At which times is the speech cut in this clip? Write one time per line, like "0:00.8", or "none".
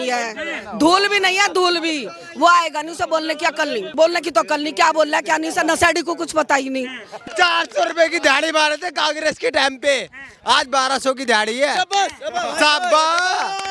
0:04.0
0:07.1